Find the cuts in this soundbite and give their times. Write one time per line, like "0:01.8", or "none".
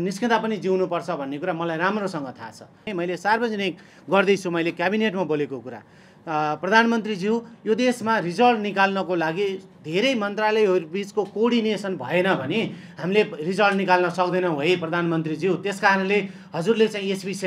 0:02.8